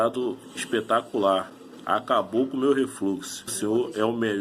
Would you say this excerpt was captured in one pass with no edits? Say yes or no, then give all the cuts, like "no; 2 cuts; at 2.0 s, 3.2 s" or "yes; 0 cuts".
no; 1 cut; at 3.5 s